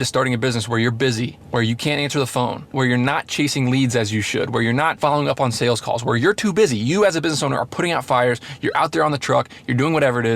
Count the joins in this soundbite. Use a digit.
3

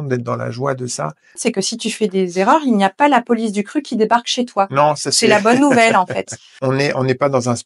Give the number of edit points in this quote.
2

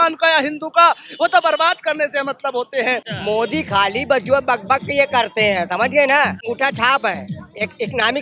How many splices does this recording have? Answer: 2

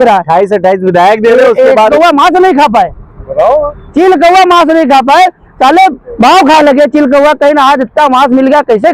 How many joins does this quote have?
1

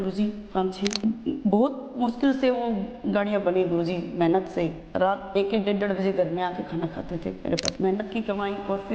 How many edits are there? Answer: 2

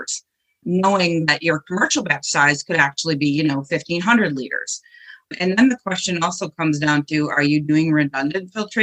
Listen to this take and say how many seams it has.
0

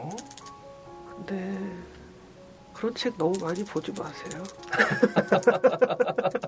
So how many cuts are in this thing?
1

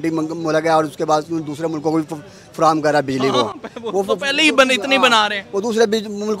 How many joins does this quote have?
0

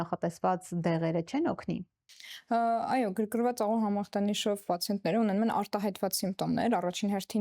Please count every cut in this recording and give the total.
0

